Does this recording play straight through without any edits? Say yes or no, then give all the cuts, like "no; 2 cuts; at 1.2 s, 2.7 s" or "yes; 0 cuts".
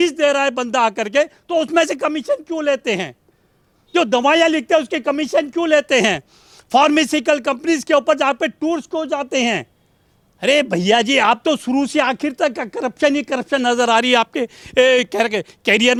yes; 0 cuts